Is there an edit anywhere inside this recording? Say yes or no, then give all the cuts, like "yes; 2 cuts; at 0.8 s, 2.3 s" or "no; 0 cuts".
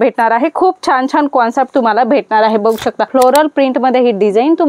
yes; 1 cut; at 3.1 s